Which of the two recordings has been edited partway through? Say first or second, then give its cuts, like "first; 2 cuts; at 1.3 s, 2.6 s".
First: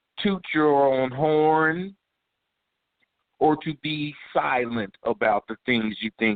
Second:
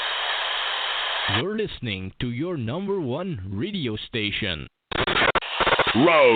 second; 1 cut; at 1.2 s